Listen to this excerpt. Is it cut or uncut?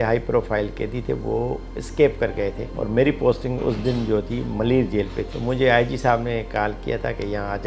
uncut